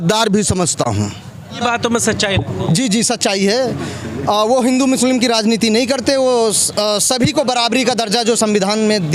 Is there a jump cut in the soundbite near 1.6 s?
yes; 1 cut; at 1.6 s

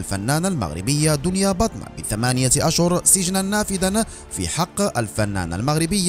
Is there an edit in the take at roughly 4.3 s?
no; 0 cuts

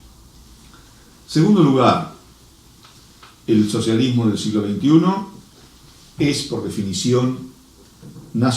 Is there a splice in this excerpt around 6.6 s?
yes; 1 cut; at 6.6 s

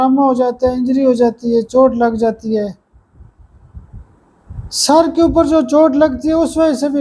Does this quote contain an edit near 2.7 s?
no; 0 cuts

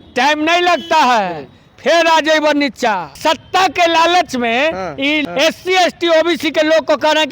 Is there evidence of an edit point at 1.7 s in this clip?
no; 2 cuts; at 3.1 s, 5.2 s

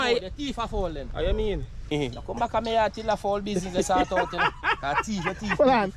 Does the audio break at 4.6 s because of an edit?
no; 1 cut; at 1.9 s

